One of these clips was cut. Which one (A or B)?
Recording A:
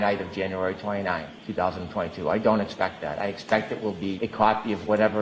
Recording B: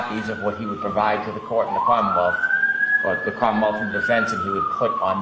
A